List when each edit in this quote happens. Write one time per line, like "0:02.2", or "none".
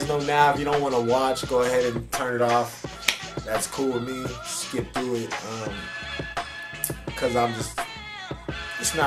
none